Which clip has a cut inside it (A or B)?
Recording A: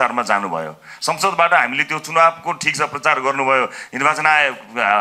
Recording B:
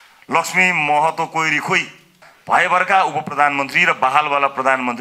B